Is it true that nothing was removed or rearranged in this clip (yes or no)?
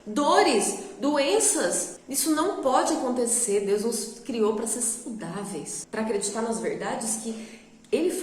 no